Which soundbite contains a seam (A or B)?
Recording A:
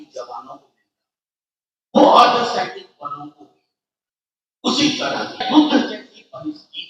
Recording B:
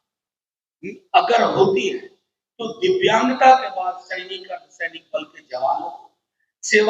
A